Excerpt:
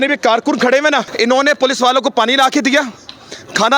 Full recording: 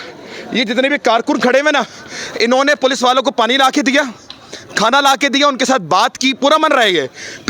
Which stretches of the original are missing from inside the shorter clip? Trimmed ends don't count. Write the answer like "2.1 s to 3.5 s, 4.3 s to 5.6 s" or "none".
1.9 s to 2.3 s